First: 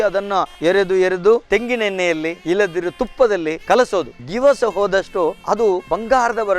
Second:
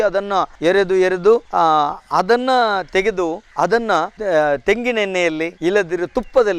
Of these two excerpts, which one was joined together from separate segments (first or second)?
first